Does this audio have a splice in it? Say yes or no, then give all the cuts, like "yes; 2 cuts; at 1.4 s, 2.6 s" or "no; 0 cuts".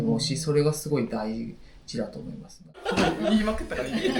yes; 1 cut; at 2.8 s